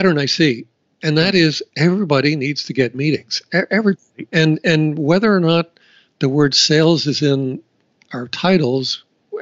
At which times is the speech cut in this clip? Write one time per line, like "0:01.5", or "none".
none